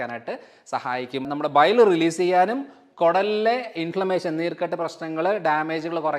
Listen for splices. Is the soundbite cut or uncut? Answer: cut